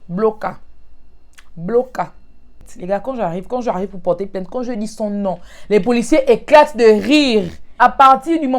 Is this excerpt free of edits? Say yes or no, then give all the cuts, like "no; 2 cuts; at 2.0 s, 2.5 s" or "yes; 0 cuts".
no; 2 cuts; at 2.7 s, 7.6 s